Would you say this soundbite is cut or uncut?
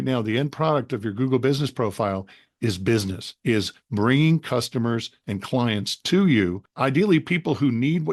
cut